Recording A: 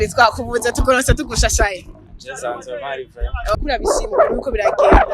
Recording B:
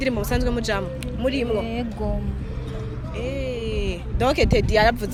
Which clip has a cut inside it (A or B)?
A